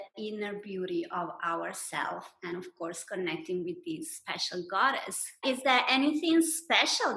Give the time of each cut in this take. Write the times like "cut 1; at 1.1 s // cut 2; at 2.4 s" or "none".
cut 1; at 5.4 s